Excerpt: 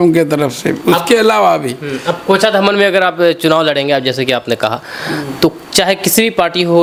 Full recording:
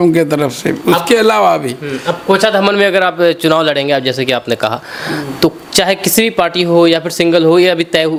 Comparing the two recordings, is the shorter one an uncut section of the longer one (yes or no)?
yes